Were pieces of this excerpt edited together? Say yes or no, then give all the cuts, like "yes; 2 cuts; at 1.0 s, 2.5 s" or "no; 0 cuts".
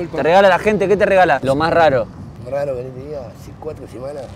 yes; 2 cuts; at 1.4 s, 2.3 s